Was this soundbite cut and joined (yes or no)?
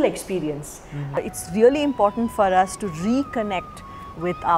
yes